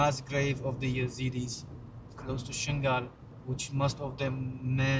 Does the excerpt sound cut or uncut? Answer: uncut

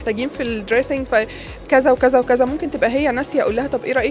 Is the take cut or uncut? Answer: uncut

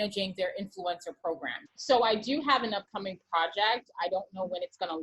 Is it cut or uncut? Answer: cut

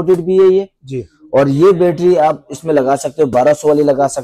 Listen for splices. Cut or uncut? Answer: uncut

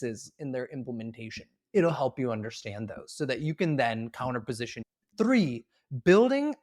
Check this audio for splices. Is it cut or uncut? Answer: cut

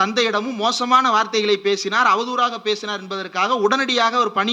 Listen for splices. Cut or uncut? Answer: uncut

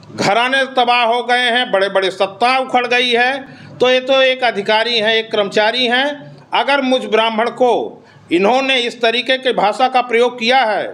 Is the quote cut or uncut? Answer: uncut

